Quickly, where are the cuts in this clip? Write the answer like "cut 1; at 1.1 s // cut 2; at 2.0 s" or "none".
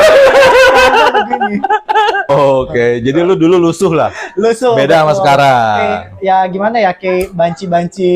cut 1; at 2.3 s